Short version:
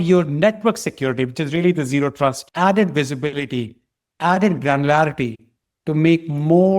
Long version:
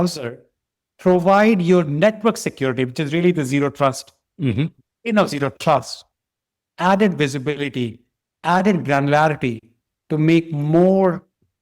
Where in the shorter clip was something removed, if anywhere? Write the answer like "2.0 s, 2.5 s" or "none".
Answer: 2.4 s